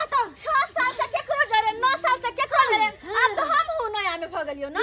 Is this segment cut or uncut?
uncut